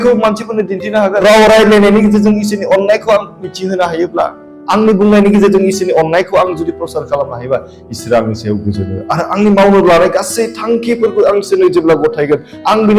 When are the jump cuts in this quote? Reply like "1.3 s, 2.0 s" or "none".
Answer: 1.2 s